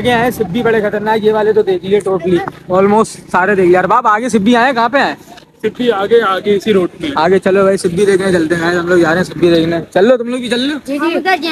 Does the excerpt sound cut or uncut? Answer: uncut